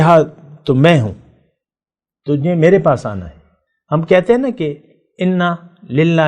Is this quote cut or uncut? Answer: uncut